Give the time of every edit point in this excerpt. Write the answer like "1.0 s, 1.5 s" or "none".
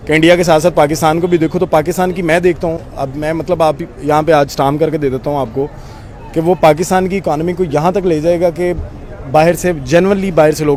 none